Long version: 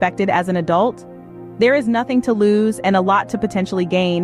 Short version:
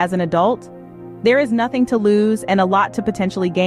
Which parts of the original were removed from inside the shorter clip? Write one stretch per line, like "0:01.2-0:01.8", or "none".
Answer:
none